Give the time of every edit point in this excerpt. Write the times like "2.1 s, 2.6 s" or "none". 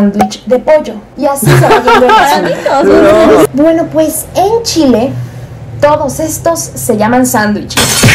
3.5 s